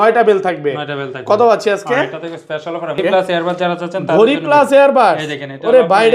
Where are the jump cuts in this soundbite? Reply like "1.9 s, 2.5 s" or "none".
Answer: 3.0 s